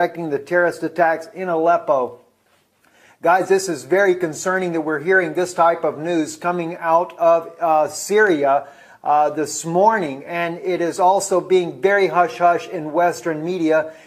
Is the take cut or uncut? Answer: cut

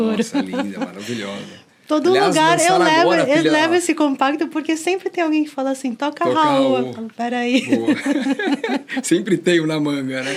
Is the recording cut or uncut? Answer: uncut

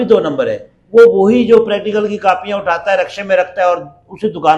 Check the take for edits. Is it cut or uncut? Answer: uncut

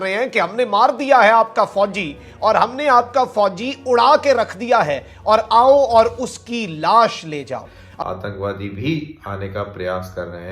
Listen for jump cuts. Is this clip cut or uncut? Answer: cut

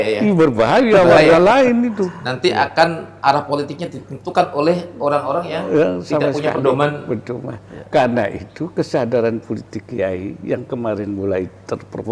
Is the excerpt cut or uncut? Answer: uncut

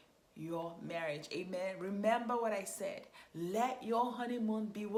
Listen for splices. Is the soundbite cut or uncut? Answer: uncut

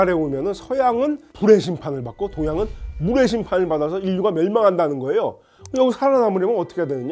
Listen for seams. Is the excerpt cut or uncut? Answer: cut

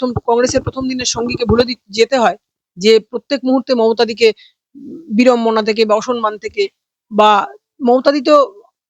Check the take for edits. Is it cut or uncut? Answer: uncut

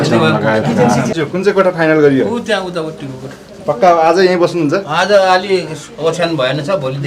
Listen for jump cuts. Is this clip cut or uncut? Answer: cut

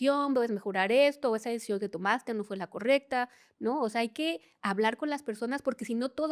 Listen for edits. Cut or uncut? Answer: uncut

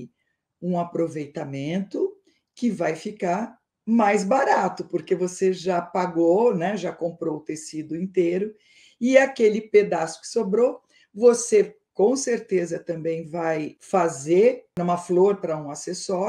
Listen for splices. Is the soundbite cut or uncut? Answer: cut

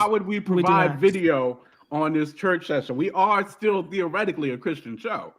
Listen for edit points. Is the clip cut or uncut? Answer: uncut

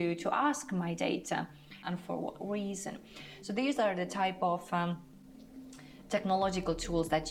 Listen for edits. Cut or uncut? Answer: cut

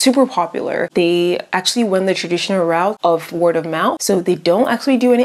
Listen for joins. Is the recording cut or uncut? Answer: uncut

